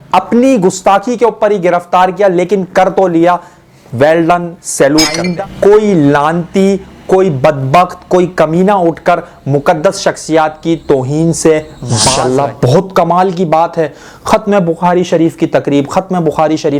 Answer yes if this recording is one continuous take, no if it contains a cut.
no